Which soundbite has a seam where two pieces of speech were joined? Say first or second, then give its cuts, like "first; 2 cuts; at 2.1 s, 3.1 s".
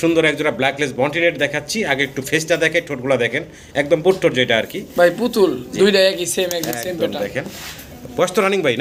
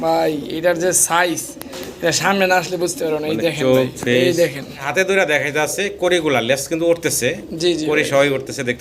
second; 1 cut; at 4.7 s